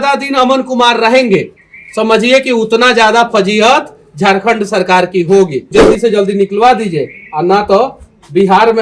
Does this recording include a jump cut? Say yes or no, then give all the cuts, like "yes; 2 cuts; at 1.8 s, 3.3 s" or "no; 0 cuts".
yes; 1 cut; at 5.8 s